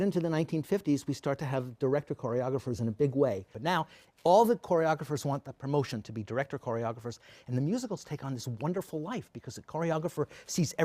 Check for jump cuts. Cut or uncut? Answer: cut